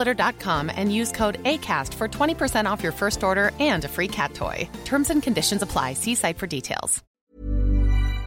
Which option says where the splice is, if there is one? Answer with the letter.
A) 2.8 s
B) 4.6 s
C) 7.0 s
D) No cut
C